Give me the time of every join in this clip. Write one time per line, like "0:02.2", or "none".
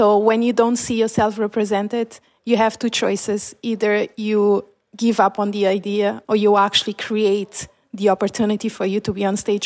0:06.2